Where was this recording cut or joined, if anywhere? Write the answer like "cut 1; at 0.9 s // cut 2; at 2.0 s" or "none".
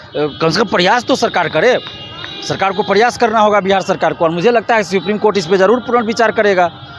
none